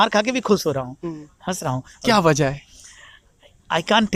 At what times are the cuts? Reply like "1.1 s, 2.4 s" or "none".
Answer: none